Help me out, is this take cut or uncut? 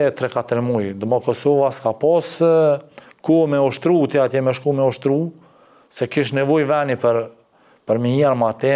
uncut